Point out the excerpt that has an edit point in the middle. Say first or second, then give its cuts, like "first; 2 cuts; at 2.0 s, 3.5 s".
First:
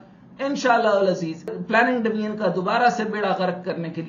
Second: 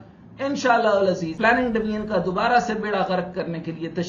second; 1 cut; at 1.3 s